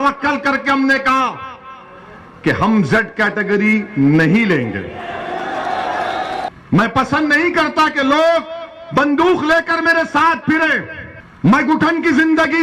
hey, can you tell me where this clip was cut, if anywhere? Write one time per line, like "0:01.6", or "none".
0:06.5